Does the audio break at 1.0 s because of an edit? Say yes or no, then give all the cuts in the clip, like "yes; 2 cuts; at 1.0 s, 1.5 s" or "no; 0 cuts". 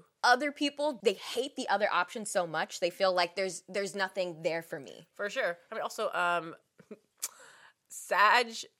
yes; 1 cut; at 1.0 s